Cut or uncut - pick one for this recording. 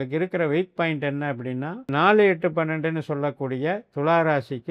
cut